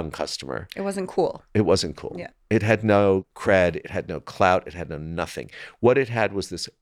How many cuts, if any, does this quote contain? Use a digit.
1